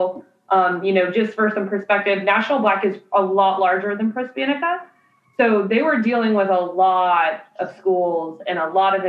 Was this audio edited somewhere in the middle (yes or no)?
no